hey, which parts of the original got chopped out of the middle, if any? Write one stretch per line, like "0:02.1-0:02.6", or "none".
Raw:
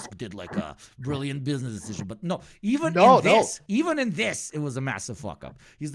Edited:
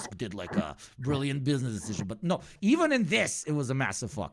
0:02.5-0:03.6

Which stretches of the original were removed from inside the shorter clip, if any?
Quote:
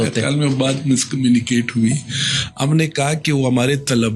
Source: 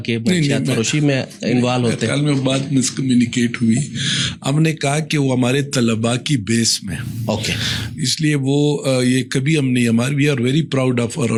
none

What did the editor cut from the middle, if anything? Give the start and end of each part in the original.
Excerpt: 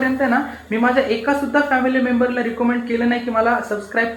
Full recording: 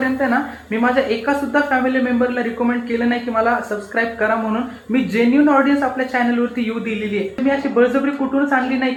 none

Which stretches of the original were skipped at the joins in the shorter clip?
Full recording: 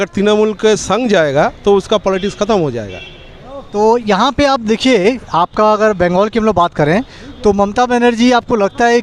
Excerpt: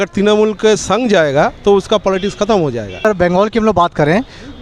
0:03.0-0:05.8

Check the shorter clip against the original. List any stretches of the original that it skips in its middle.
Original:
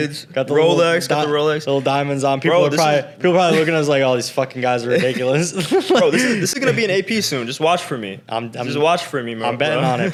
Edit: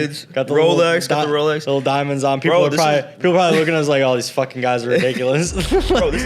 none

